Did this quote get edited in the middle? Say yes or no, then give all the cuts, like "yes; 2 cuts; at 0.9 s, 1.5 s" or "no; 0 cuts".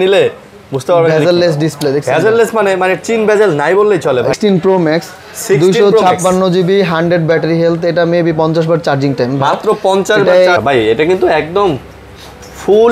yes; 2 cuts; at 4.3 s, 10.6 s